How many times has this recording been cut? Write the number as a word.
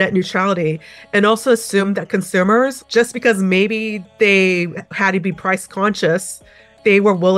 one